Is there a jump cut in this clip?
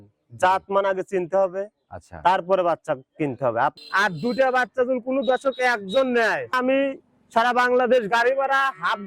yes; 2 cuts; at 3.8 s, 6.5 s

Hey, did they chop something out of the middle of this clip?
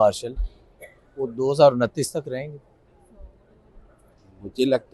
no; 0 cuts

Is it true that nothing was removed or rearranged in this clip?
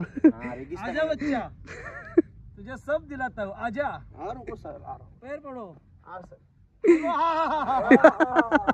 yes; 0 cuts

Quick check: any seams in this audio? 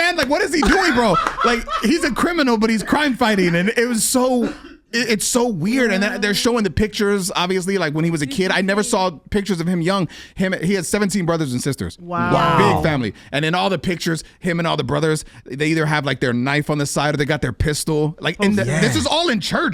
no; 0 cuts

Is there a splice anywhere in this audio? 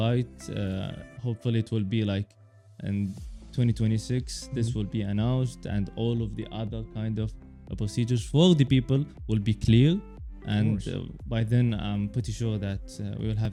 no; 0 cuts

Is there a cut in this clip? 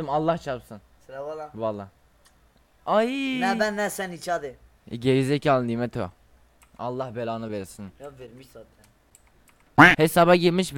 yes; 1 cut; at 9.9 s

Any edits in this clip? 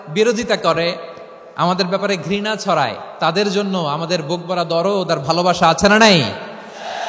no; 0 cuts

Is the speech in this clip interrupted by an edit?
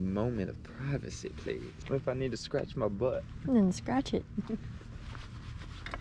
yes; 1 cut; at 1.7 s

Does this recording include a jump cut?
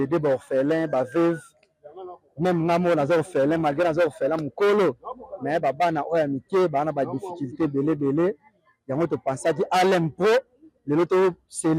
no; 0 cuts

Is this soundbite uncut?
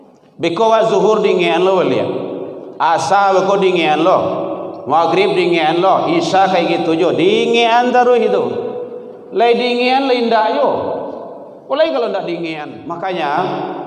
no; 1 cut; at 12.7 s

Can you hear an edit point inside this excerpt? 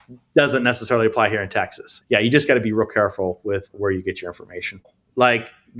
yes; 3 cuts; at 1.9 s, 3.7 s, 4.7 s

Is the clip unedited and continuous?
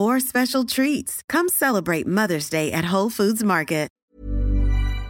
no; 1 cut; at 4.0 s

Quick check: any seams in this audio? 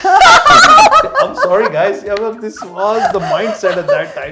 no; 0 cuts

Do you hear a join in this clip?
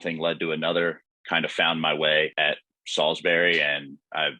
yes; 2 cuts; at 1.1 s, 2.3 s

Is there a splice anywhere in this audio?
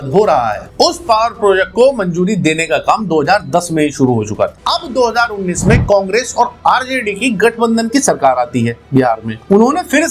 yes; 1 cut; at 4.6 s

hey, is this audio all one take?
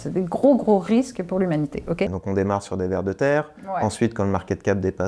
no; 1 cut; at 2.2 s

